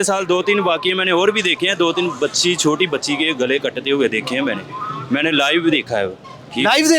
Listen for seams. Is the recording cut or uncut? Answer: uncut